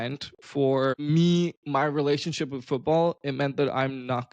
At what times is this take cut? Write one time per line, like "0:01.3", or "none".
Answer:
0:01.0